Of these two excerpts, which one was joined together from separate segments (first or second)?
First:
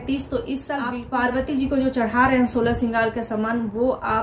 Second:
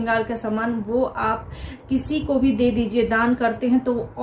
first